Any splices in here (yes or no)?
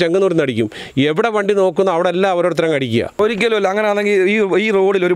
yes